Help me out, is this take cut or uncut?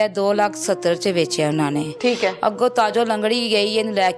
cut